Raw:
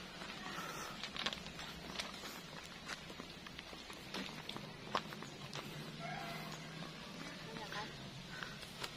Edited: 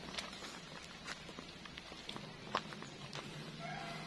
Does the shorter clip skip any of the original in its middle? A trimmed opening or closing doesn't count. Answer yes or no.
yes